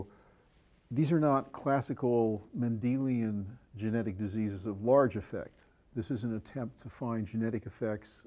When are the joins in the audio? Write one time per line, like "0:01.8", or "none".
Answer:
none

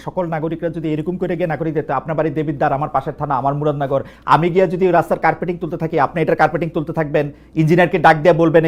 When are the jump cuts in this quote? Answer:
none

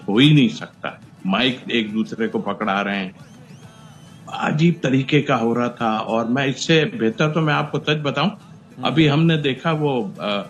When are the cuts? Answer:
none

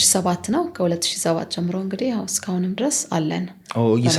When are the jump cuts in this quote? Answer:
none

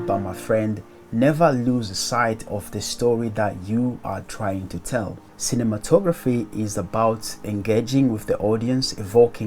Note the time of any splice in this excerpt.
0:05.2

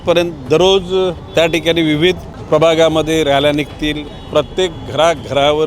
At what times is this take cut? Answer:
0:01.2
0:02.3
0:04.1

